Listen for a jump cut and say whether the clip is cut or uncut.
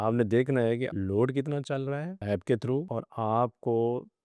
cut